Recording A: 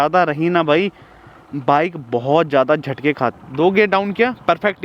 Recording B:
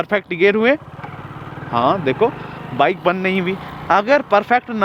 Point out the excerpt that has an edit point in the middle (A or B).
A